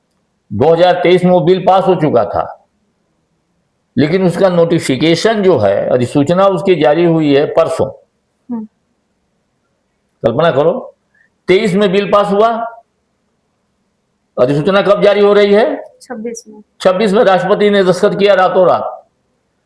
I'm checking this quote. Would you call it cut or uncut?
uncut